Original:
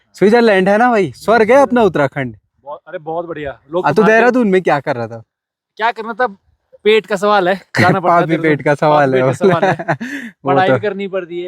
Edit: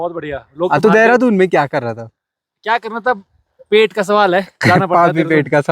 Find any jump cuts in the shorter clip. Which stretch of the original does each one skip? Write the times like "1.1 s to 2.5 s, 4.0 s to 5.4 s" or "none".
none